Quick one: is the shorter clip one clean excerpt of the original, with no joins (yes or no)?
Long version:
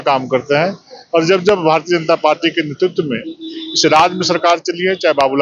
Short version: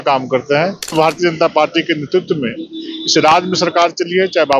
no